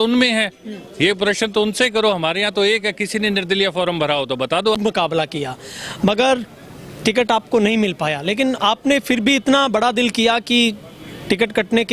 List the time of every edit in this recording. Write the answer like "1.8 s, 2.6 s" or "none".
4.8 s